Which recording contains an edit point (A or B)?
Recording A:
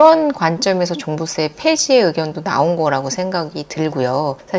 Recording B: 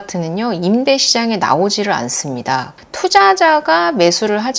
B